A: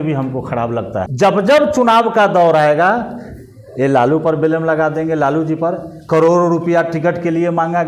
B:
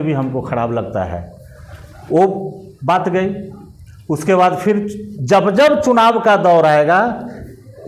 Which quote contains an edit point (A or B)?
A